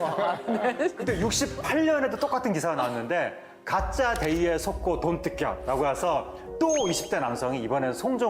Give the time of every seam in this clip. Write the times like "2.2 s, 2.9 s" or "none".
none